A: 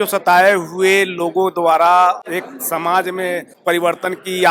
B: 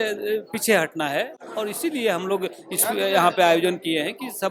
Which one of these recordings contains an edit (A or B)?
A